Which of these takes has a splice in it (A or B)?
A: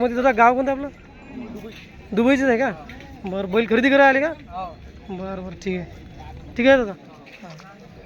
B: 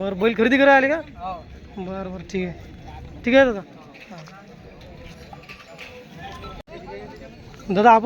B